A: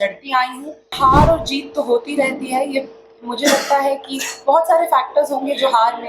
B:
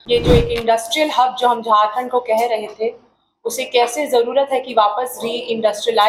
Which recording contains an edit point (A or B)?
A